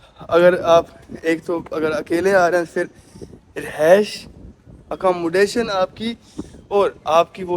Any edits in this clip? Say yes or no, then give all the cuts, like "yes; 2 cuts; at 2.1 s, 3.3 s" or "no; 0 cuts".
no; 0 cuts